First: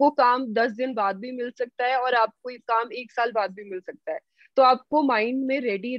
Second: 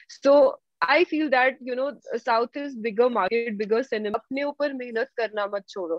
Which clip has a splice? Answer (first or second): second